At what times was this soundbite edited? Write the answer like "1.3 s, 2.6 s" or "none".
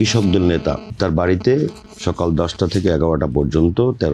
1.0 s, 1.9 s